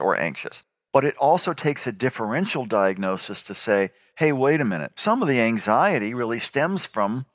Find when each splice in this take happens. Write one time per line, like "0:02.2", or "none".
0:04.9